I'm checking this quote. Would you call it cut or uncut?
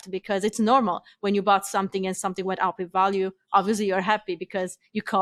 uncut